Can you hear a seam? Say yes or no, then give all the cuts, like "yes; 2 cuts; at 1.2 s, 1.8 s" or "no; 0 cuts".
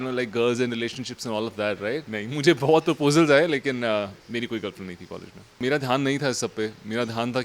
yes; 2 cuts; at 2.1 s, 5.6 s